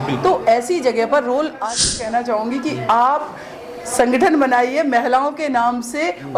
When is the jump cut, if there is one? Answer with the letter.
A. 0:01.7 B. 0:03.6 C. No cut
A